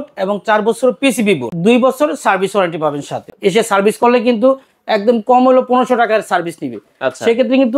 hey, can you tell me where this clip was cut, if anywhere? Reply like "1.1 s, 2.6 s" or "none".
1.5 s, 3.3 s